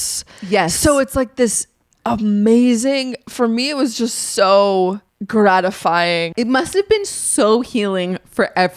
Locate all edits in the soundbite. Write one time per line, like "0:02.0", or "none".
0:05.1
0:06.3